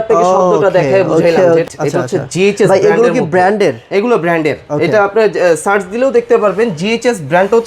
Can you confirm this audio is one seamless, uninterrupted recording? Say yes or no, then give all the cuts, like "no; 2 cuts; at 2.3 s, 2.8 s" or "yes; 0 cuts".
no; 1 cut; at 1.7 s